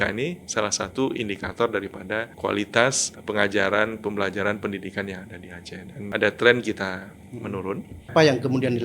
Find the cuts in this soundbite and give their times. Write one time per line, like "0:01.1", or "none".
0:02.3
0:03.1
0:06.0
0:08.1